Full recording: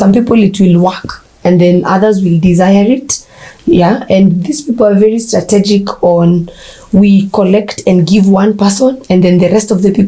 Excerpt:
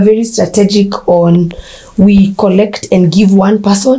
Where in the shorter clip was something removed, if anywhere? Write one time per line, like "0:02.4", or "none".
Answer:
none